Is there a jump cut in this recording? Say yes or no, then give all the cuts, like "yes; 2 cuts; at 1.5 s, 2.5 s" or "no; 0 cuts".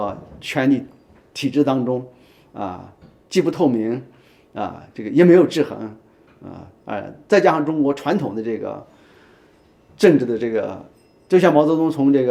no; 0 cuts